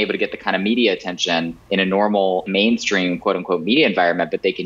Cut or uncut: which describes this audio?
cut